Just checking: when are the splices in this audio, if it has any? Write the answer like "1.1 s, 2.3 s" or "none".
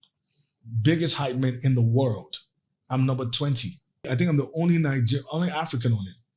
4.1 s